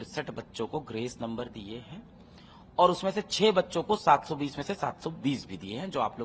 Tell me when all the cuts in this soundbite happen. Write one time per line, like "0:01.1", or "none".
none